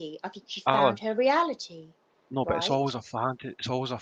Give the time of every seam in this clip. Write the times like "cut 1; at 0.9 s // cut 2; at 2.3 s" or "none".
none